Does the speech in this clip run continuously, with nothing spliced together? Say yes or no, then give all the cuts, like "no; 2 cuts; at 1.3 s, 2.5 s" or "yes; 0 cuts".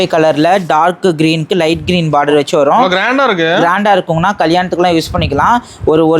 yes; 0 cuts